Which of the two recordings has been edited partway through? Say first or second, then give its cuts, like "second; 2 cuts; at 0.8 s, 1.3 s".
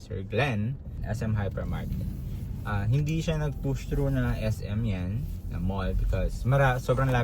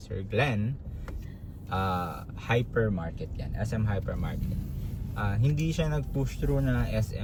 first; 1 cut; at 0.9 s